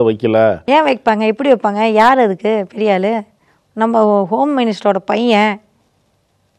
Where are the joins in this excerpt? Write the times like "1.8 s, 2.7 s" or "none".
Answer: none